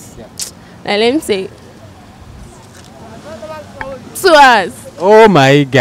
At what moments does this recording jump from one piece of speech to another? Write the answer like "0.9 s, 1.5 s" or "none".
4.7 s